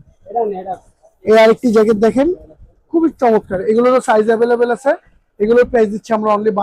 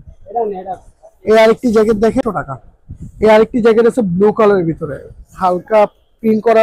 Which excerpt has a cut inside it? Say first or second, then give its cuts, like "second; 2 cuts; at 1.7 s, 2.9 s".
second; 1 cut; at 2.2 s